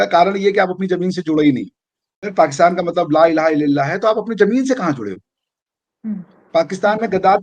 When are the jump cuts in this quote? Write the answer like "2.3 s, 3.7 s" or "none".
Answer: 2.3 s